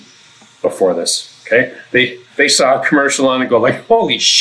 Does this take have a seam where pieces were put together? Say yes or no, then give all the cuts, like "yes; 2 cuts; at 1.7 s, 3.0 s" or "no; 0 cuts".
no; 0 cuts